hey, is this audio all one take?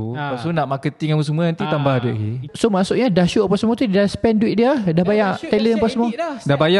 no; 1 cut; at 2.4 s

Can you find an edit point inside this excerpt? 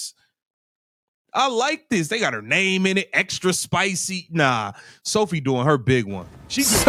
no; 0 cuts

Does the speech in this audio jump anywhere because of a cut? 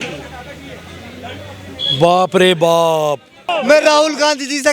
yes; 1 cut; at 3.5 s

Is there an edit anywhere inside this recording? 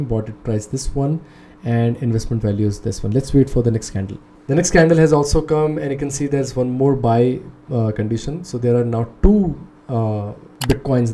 no; 0 cuts

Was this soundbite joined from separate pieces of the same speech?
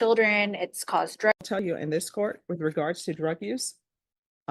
yes; 1 cut; at 1.3 s

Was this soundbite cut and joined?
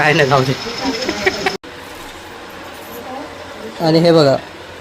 yes; 1 cut; at 1.6 s

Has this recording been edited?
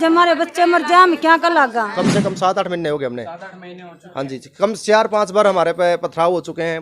yes; 1 cut; at 1.9 s

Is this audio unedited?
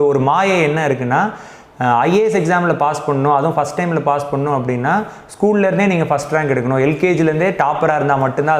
yes; 0 cuts

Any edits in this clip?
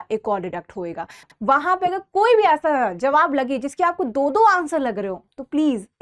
yes; 1 cut; at 1.3 s

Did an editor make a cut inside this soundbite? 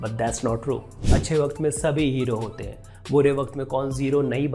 yes; 1 cut; at 1.2 s

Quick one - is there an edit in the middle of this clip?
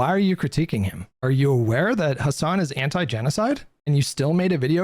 yes; 1 cut; at 1.1 s

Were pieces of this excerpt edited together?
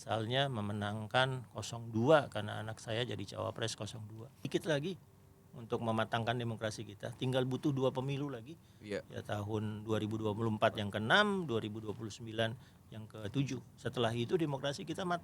yes; 1 cut; at 4.5 s

